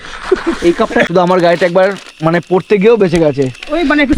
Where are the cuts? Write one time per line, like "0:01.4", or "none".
0:01.1